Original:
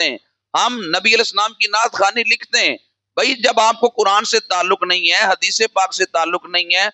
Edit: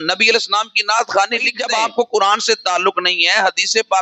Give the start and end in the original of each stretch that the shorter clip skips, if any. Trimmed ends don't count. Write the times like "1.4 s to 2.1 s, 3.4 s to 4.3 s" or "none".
2.4 s to 3.4 s